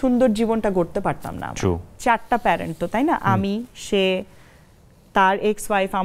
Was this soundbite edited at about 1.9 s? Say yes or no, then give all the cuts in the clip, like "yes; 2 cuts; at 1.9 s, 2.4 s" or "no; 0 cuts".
yes; 1 cut; at 1.9 s